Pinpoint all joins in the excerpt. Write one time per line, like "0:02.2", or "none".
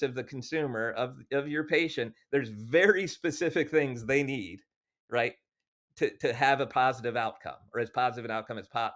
none